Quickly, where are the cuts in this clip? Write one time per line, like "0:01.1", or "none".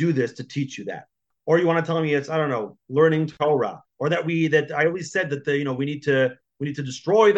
0:01.3
0:03.3